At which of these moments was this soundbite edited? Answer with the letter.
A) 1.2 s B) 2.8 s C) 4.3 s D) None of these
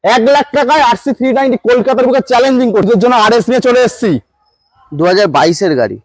B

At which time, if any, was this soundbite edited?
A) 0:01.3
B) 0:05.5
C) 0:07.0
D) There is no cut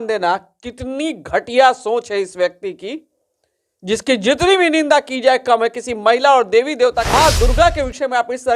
C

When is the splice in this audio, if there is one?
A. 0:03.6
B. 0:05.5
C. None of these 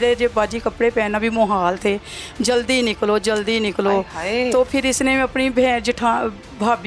C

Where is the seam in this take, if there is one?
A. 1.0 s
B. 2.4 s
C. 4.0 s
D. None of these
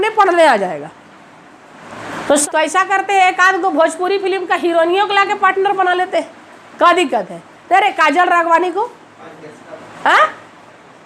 B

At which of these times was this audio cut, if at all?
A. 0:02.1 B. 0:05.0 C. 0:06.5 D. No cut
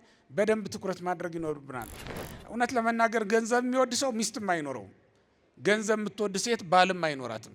A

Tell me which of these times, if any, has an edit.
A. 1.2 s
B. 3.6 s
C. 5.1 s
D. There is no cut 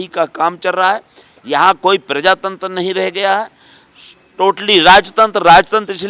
D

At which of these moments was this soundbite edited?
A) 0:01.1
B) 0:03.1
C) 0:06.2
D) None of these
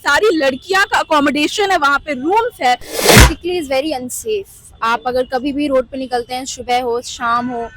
B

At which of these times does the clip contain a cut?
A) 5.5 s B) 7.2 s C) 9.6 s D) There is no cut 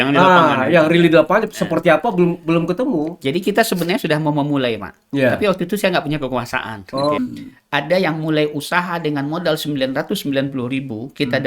B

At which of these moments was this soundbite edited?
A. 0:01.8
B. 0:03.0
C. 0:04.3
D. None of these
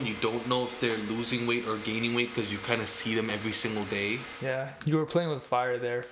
C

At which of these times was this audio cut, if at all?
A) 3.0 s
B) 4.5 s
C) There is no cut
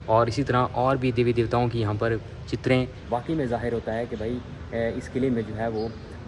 A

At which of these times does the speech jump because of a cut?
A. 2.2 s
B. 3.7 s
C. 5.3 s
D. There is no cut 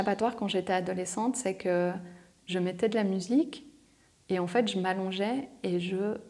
D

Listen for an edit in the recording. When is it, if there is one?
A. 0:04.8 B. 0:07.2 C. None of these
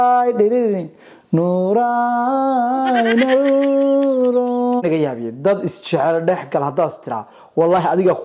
A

